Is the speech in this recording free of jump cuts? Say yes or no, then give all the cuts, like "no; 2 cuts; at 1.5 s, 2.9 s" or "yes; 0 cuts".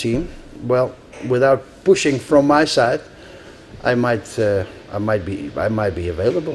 no; 1 cut; at 2.5 s